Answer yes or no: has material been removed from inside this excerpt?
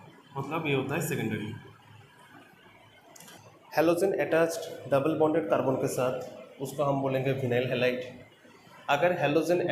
yes